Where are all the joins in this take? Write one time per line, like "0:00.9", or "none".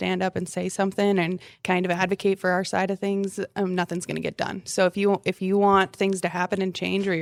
none

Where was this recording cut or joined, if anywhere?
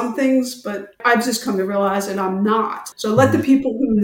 0:00.9
0:02.9

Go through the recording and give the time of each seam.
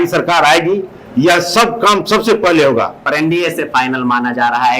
0:03.0

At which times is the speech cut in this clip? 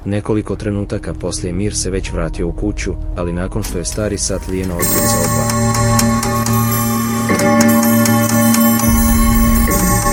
none

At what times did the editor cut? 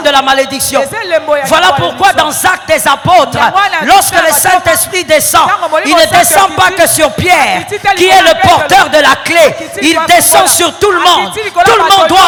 none

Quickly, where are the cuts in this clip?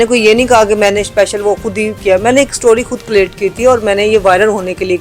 none

